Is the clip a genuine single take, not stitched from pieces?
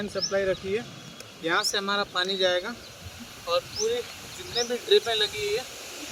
yes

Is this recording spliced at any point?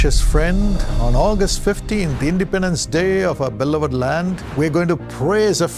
no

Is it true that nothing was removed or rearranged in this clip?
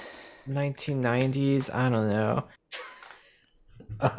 no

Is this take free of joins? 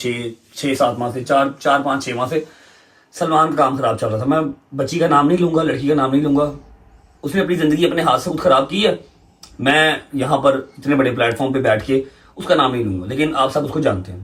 yes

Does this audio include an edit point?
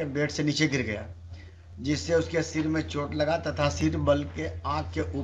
no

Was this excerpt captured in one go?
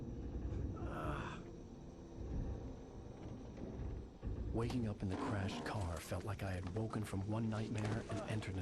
yes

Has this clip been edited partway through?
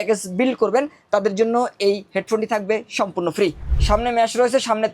yes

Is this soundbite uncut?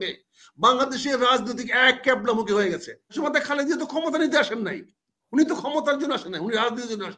no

